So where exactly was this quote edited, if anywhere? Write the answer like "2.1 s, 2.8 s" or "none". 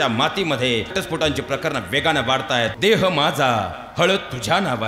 0.9 s, 2.7 s